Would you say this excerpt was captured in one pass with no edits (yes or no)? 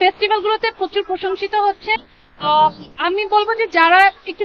yes